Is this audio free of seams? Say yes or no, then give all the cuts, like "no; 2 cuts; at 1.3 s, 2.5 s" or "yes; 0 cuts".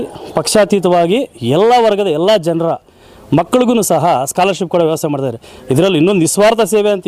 yes; 0 cuts